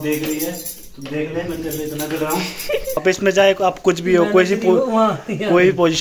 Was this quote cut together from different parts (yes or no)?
yes